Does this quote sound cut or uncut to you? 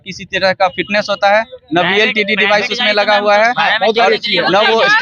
uncut